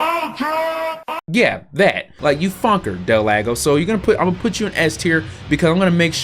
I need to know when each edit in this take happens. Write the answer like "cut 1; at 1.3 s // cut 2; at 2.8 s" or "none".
cut 1; at 2.1 s